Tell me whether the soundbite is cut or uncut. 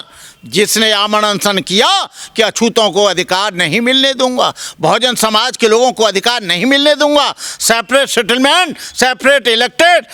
uncut